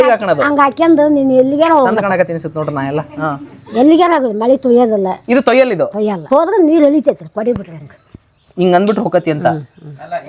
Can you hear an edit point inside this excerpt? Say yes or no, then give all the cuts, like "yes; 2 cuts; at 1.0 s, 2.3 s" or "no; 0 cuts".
no; 0 cuts